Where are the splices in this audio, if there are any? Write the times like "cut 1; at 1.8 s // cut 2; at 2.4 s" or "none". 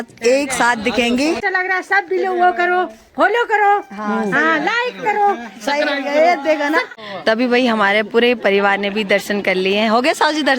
cut 1; at 1.4 s // cut 2; at 6.9 s